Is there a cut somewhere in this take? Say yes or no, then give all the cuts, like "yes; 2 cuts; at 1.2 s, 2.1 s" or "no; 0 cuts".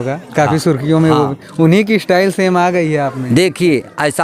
no; 0 cuts